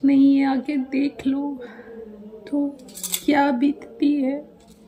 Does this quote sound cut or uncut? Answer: uncut